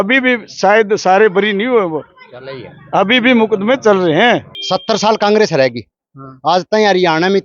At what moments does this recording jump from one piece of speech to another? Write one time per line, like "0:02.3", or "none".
0:04.5